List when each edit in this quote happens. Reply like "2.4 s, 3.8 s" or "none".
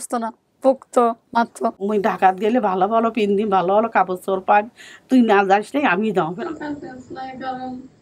1.8 s, 6.3 s